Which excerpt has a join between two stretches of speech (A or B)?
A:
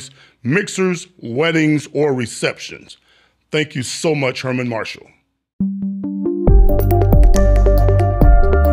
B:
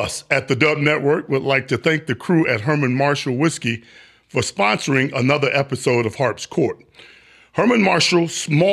A